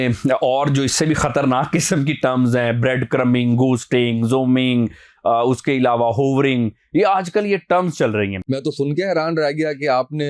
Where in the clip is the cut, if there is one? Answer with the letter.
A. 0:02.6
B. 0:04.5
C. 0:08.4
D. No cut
C